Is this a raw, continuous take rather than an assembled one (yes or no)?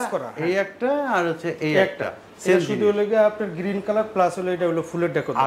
yes